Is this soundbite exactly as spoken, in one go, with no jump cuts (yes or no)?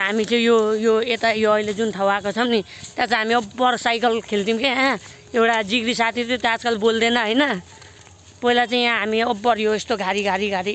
yes